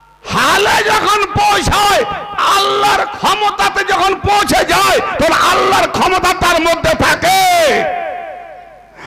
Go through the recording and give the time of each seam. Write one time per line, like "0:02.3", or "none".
none